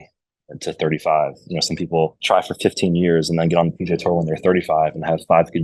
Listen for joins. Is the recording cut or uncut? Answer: cut